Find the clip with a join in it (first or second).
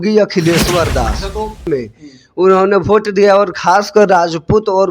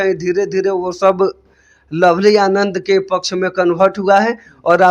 first